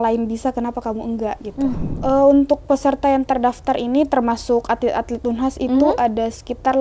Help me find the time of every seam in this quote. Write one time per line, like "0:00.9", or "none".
0:01.9